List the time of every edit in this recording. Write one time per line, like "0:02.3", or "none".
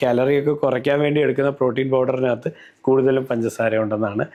none